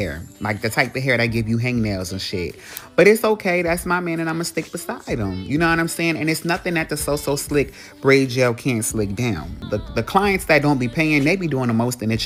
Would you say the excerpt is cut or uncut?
uncut